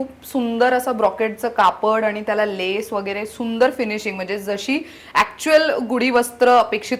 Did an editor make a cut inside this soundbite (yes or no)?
no